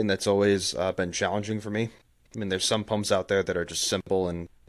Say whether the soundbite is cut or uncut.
uncut